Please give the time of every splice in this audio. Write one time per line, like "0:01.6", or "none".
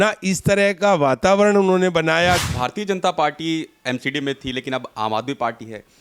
0:02.5